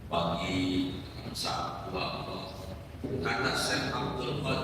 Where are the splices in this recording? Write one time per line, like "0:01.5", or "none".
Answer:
0:03.0